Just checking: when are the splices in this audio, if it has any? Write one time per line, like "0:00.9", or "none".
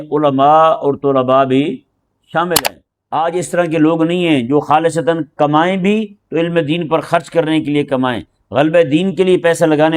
0:02.6